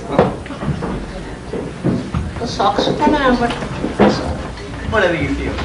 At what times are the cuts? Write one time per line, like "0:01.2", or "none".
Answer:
0:03.6